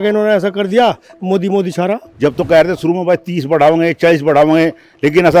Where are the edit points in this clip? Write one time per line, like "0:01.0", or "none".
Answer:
0:02.1